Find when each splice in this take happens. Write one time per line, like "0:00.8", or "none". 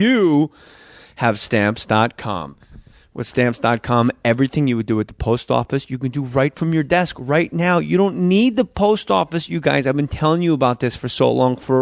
0:01.2